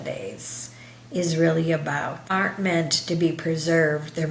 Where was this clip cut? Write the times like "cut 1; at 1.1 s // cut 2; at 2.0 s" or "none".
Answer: cut 1; at 2.2 s